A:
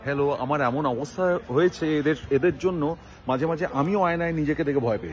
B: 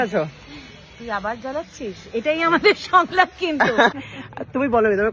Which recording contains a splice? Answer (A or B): B